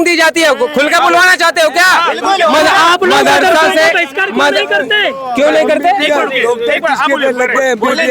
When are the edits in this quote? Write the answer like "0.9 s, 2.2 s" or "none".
none